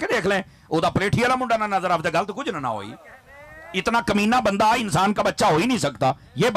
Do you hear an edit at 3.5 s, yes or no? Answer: no